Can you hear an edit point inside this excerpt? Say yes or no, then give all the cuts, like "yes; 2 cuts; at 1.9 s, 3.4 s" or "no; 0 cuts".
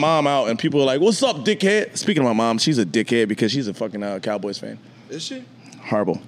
no; 0 cuts